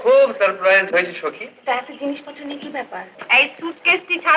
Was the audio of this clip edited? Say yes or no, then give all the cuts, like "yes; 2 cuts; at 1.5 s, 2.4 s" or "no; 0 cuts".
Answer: yes; 1 cut; at 3.1 s